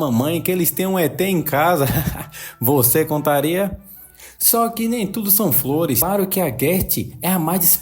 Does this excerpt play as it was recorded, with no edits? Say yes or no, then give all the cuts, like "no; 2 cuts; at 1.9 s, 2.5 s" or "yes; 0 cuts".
no; 1 cut; at 6.0 s